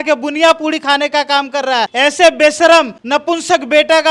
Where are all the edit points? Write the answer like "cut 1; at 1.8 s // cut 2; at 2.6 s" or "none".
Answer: cut 1; at 1.9 s // cut 2; at 3.0 s